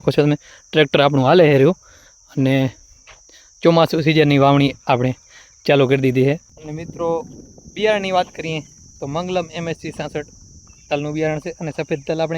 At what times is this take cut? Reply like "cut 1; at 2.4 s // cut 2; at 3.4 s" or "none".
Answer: cut 1; at 6.5 s

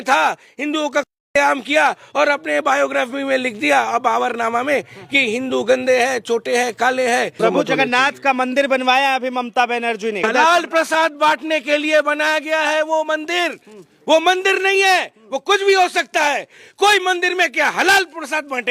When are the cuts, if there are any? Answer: cut 1; at 7.4 s // cut 2; at 10.2 s

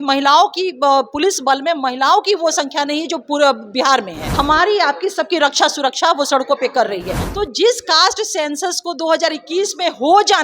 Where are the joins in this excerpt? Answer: cut 1; at 4.2 s // cut 2; at 7.2 s

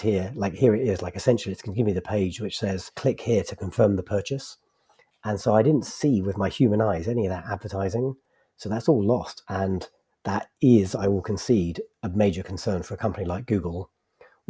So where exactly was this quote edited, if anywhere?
cut 1; at 2.9 s // cut 2; at 9.4 s

